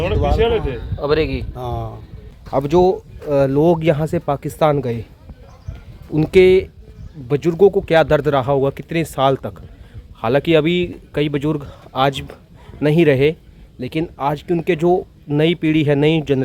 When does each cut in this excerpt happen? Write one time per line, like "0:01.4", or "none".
0:02.3